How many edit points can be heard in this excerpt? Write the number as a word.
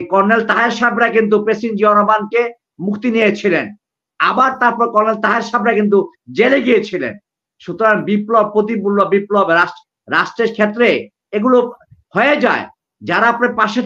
zero